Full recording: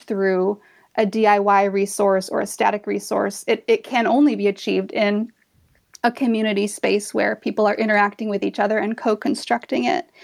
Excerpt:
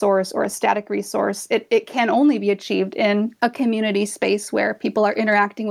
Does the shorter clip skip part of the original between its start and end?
yes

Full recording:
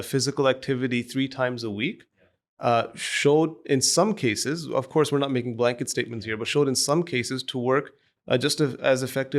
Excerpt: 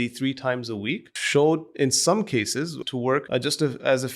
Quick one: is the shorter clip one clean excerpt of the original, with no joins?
no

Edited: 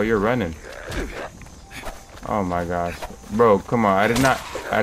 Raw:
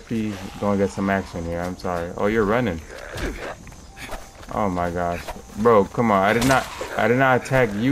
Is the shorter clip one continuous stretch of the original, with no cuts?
yes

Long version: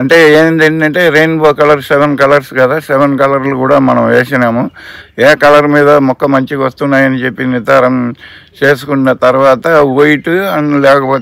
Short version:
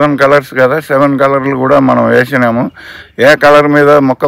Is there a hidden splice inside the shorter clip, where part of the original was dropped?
no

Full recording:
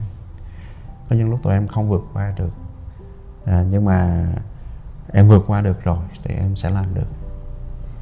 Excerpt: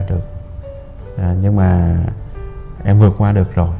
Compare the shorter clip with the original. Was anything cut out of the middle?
no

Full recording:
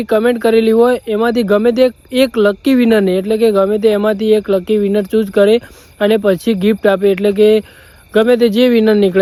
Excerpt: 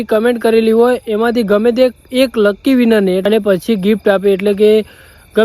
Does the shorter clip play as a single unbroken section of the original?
no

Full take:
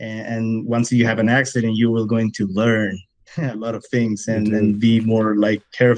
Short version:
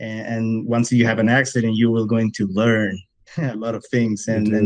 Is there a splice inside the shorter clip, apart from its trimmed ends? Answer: no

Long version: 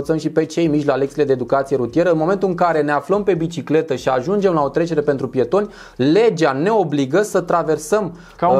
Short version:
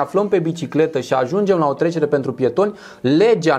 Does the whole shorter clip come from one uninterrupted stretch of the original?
yes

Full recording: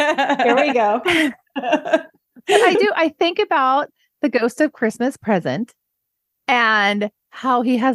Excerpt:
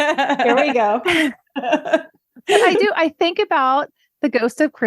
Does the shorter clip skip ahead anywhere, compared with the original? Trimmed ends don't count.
no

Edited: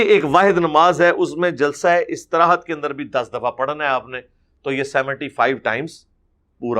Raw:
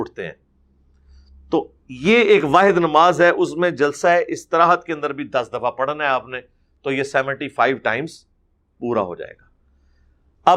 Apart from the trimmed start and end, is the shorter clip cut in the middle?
no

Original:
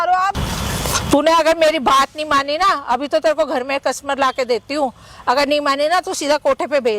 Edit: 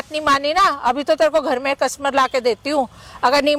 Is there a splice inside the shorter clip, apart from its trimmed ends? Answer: no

